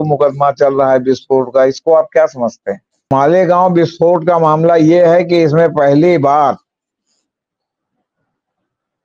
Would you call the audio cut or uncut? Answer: cut